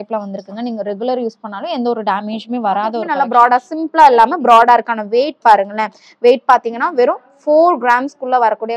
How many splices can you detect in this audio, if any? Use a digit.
1